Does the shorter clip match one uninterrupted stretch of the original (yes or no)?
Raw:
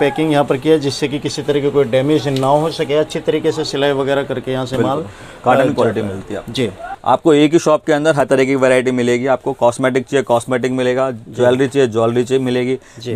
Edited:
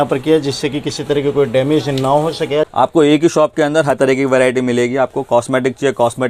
no